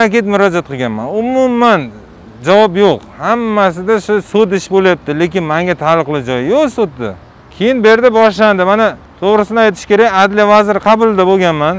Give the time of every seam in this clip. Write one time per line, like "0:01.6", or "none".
none